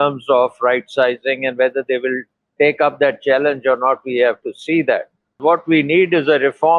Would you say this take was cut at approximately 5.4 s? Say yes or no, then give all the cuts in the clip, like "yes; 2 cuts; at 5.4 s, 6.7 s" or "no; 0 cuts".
yes; 1 cut; at 5.4 s